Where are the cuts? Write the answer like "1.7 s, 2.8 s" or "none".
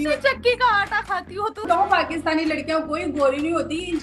1.6 s